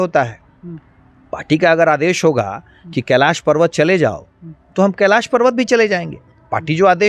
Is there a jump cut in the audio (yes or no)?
no